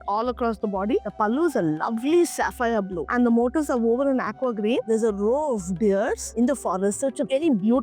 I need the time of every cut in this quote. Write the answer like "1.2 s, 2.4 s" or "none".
1.0 s, 3.1 s, 4.8 s